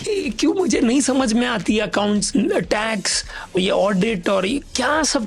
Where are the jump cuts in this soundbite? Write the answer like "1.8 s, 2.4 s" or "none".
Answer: 2.3 s, 3.6 s